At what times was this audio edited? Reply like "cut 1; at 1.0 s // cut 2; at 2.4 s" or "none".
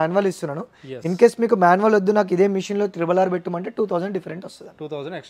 none